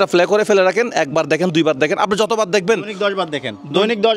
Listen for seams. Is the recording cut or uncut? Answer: uncut